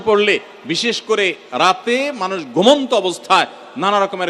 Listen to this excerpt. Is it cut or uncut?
uncut